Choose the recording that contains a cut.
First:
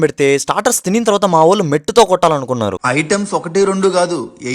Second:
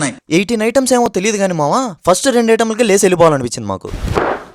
first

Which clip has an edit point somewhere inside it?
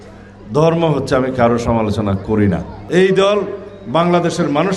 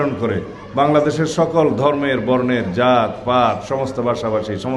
first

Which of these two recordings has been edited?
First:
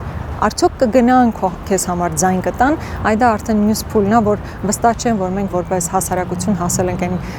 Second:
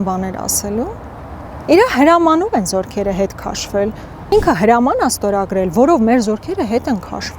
second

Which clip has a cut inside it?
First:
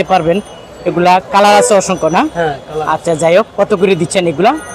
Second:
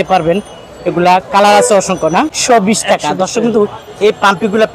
second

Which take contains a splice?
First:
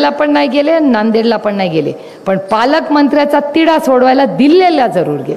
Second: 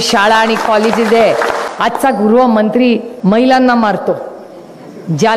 second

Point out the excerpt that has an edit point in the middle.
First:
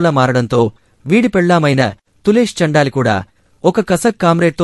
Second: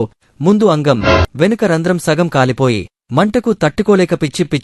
first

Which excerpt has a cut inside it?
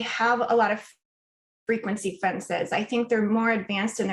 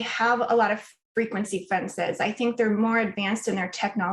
second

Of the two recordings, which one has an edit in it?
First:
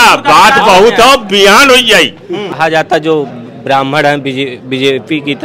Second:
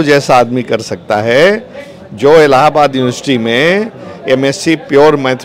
first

